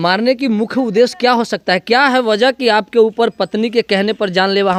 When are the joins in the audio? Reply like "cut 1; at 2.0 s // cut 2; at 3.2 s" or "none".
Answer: none